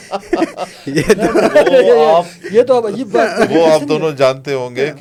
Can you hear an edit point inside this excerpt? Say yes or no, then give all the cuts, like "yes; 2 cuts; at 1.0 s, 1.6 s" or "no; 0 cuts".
no; 0 cuts